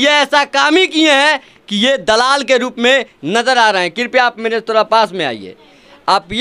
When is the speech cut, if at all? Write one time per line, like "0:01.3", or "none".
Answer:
none